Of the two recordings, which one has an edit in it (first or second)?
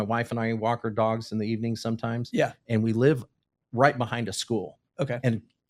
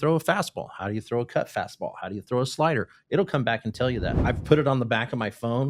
second